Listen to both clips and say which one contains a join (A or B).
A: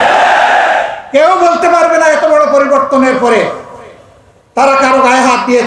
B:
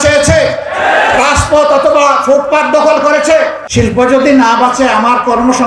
B